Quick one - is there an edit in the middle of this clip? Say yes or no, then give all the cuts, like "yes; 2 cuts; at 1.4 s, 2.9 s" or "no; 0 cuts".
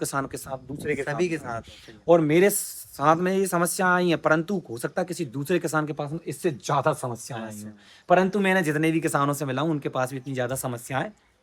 no; 0 cuts